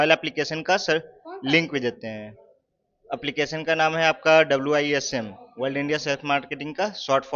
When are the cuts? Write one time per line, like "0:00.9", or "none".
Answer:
none